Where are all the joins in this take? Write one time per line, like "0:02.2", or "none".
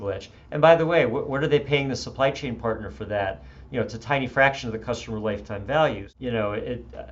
0:06.1